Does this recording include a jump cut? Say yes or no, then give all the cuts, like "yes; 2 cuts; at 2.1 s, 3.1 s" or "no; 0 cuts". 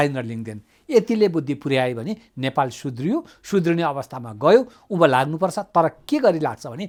no; 0 cuts